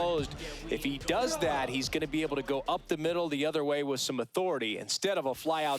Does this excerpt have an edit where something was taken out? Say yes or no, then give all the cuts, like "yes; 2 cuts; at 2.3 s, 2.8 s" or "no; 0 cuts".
yes; 1 cut; at 4.9 s